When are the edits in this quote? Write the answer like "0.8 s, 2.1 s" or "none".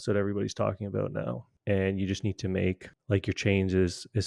1.5 s, 2.9 s